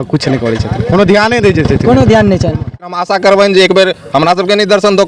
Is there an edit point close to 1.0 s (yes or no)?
no